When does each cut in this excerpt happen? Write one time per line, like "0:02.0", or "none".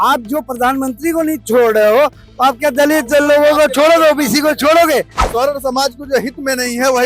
0:05.2